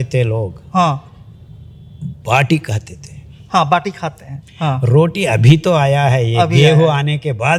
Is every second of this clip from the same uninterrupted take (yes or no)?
yes